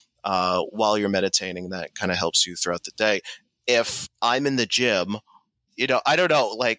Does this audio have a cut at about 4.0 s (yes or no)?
yes